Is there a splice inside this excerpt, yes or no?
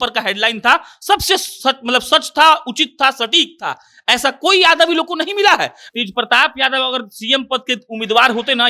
yes